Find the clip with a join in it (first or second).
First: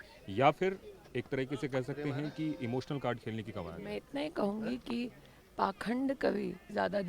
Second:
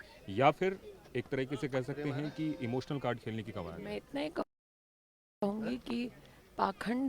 first